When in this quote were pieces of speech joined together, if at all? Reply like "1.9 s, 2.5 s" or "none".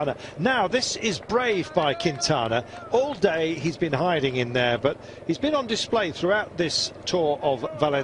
6.2 s